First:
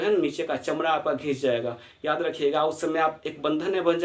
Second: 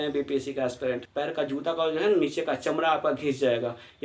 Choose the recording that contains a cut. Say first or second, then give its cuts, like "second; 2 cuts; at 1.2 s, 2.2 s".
second; 1 cut; at 1.1 s